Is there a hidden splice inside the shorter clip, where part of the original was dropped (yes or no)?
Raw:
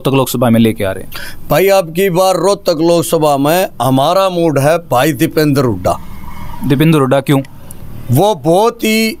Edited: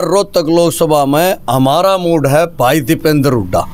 no